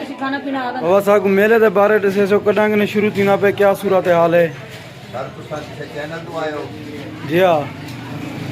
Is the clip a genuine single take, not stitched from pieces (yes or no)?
no